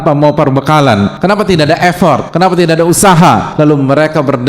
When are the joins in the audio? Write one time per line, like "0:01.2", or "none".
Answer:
0:01.1
0:02.3
0:03.5